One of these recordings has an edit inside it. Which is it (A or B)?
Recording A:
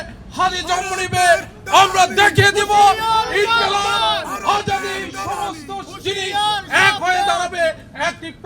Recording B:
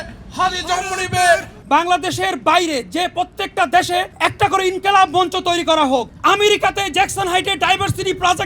B